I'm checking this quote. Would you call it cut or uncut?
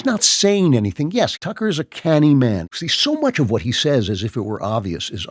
cut